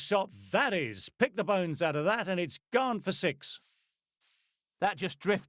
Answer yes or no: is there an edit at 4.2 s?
yes